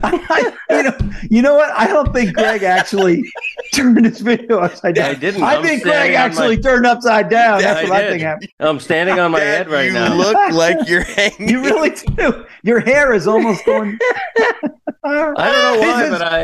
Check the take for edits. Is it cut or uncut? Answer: cut